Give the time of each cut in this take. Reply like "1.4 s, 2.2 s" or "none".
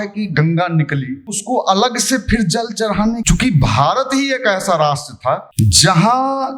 1.4 s, 3.2 s, 5.5 s